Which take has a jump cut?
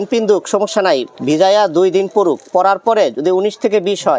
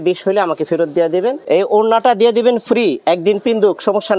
second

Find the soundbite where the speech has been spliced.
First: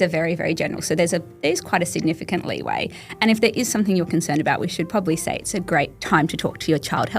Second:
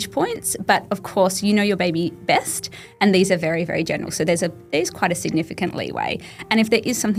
first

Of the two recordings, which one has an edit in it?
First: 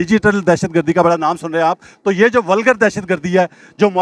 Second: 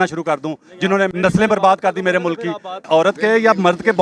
second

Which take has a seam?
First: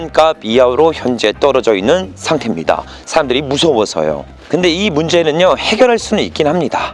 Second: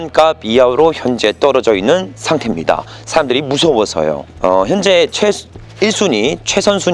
second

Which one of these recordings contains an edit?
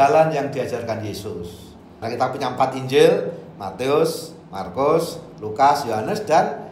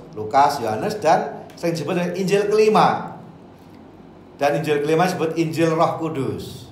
first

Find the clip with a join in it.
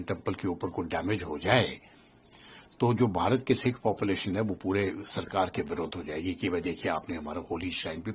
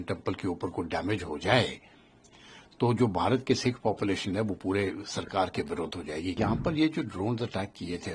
second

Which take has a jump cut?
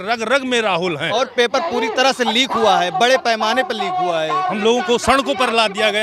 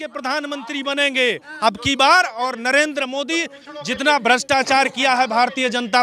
first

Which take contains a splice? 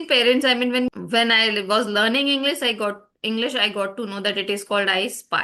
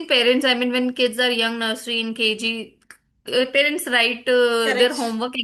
first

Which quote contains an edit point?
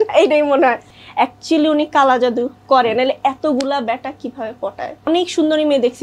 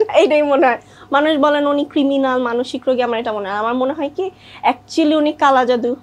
first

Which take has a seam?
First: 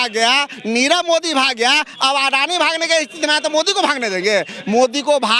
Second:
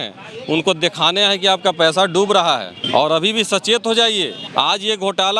second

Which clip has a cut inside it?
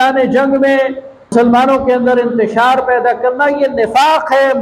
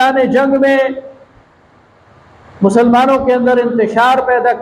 first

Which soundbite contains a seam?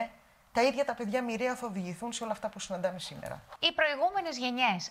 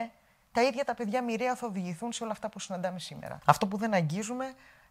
second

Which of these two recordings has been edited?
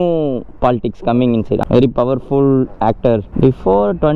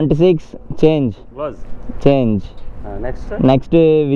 first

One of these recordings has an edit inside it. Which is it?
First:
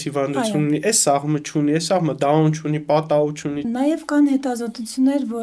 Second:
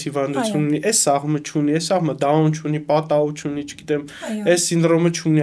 first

